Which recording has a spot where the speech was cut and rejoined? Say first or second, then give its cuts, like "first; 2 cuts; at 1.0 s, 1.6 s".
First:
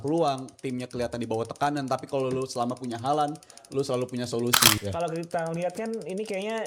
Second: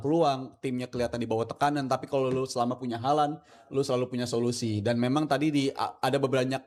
first; 1 cut; at 4.8 s